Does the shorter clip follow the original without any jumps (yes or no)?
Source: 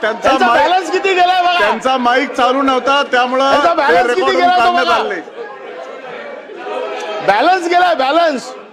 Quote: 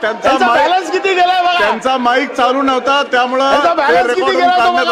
yes